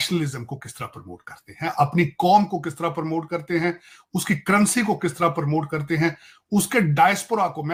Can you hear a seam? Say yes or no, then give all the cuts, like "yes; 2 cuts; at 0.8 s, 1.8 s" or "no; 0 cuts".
no; 0 cuts